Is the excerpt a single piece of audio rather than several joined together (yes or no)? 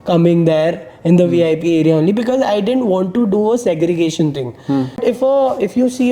no